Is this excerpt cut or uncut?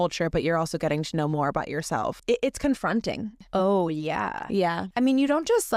cut